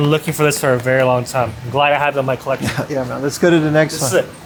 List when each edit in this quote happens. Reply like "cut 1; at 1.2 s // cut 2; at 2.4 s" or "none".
none